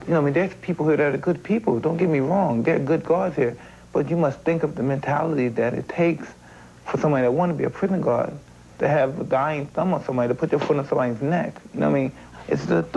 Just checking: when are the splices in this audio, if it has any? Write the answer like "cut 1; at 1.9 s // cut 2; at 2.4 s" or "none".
cut 1; at 10.9 s